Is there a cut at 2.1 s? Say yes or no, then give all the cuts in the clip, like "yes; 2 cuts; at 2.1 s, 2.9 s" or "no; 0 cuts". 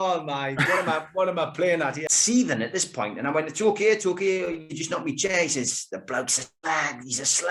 yes; 1 cut; at 2.1 s